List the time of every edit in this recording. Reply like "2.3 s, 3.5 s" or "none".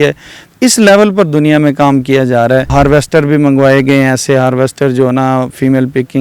2.7 s